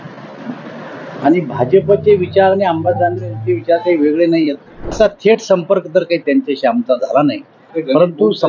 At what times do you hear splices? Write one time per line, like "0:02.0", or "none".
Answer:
0:04.9